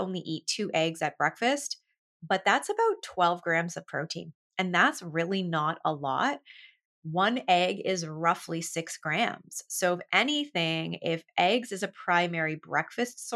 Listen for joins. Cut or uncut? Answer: uncut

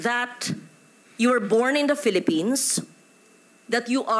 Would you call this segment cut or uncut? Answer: uncut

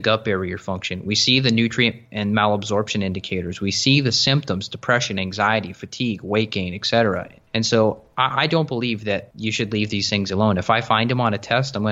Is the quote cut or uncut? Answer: cut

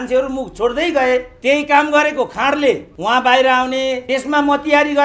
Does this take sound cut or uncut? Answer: cut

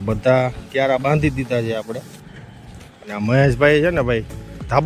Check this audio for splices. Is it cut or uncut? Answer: uncut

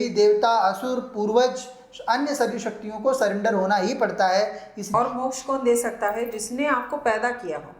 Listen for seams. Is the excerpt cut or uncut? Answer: cut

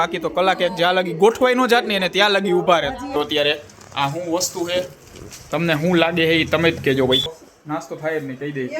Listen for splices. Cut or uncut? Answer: cut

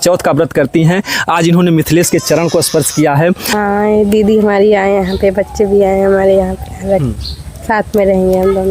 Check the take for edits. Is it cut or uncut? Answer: cut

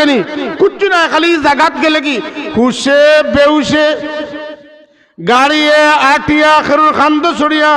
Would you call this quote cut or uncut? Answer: uncut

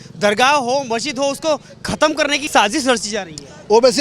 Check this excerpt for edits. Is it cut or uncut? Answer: cut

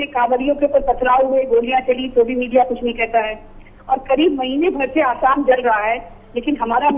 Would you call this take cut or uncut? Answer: cut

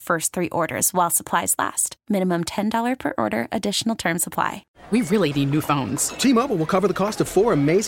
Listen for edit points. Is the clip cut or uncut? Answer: cut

